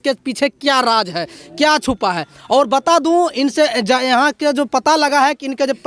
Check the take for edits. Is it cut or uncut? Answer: uncut